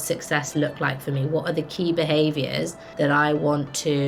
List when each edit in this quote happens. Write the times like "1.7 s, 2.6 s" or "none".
2.8 s